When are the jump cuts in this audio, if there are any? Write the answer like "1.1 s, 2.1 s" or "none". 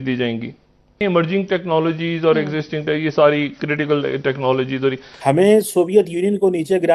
1.0 s, 5.1 s